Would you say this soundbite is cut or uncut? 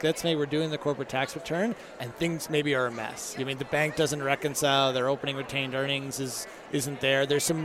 uncut